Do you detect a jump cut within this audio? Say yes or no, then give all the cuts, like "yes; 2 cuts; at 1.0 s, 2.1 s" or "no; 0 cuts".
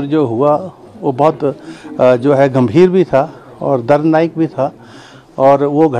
no; 0 cuts